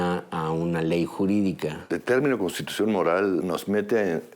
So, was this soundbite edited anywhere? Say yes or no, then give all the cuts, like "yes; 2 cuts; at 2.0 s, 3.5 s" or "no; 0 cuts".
yes; 2 cuts; at 1.7 s, 3.4 s